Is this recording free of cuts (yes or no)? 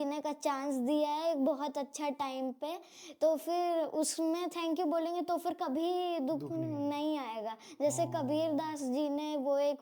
yes